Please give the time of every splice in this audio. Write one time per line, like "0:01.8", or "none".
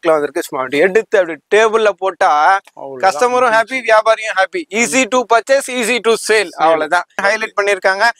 0:07.2